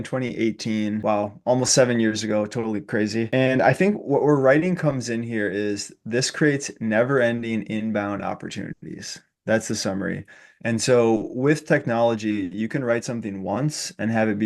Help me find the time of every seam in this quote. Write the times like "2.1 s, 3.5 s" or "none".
1.0 s, 3.3 s